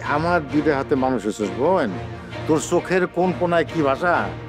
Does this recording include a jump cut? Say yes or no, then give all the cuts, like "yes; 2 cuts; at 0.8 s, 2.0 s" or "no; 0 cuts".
no; 0 cuts